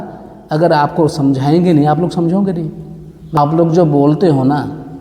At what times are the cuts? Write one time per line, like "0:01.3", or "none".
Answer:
0:03.4